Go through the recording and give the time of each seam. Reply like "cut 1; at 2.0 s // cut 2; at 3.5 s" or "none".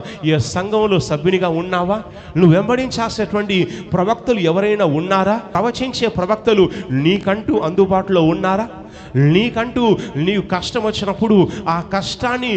cut 1; at 5.5 s